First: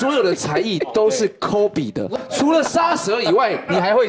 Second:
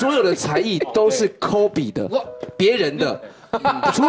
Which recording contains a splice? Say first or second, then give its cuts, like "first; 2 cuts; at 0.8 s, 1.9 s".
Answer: first; 1 cut; at 2.2 s